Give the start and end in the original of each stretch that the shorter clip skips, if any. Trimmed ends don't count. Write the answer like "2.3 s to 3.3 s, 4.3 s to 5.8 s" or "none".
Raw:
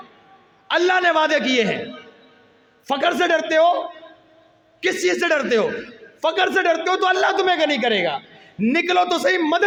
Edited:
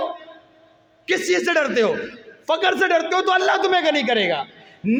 none